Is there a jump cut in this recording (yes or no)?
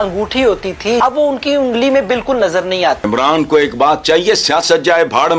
yes